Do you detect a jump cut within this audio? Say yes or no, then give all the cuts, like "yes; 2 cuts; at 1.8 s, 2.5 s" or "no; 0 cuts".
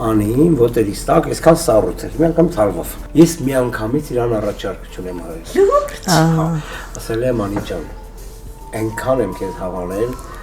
yes; 1 cut; at 2.9 s